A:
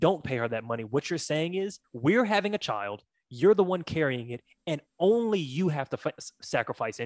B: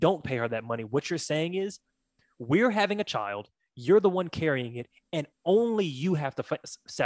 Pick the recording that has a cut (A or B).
A